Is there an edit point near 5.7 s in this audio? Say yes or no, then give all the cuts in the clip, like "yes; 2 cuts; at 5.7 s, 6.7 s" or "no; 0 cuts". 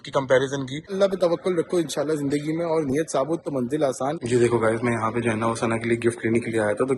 no; 2 cuts; at 0.9 s, 4.2 s